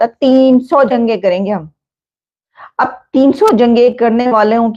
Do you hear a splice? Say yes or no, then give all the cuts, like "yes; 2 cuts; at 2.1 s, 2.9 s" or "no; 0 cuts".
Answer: no; 0 cuts